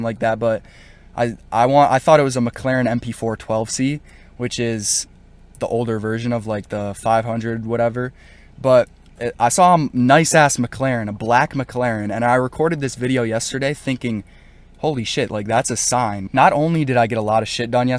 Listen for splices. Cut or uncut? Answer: cut